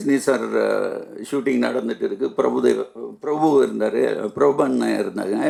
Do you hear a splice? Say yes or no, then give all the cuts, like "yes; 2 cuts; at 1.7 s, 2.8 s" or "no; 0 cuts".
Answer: no; 0 cuts